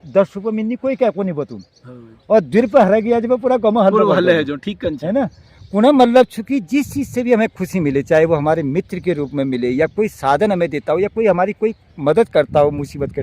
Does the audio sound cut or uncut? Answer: uncut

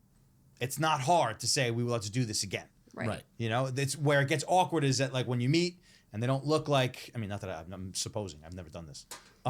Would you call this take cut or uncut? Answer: uncut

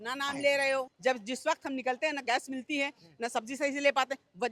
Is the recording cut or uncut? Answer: cut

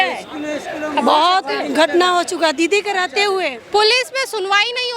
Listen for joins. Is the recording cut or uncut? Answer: uncut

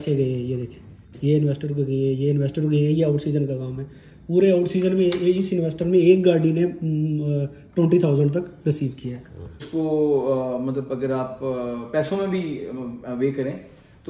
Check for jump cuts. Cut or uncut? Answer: cut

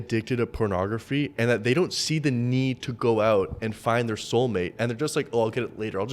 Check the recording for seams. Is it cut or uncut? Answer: uncut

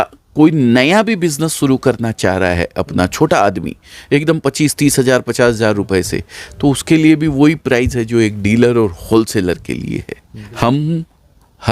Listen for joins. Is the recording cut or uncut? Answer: cut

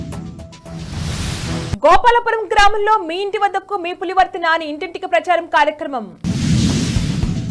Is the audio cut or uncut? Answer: cut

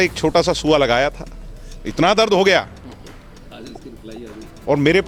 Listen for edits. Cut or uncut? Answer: uncut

